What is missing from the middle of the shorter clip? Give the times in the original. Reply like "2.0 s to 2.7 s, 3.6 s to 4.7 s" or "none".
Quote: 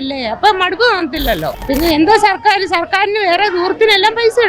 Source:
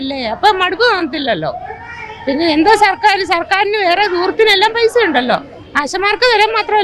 1.5 s to 2.1 s